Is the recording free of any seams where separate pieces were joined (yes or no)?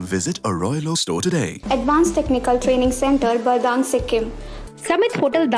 no